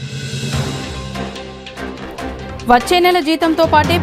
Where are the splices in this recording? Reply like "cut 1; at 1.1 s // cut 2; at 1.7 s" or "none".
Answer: cut 1; at 1.4 s